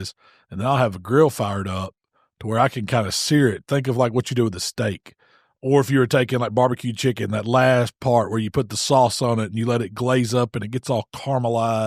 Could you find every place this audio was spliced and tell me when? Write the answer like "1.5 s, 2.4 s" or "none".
none